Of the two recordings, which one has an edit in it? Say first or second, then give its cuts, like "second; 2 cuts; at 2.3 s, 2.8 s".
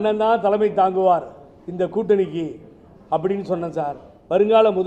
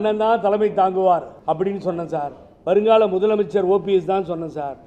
second; 1 cut; at 1.3 s